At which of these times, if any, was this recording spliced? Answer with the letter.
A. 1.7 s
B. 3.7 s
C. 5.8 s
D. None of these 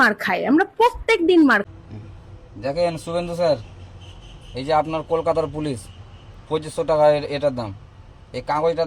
A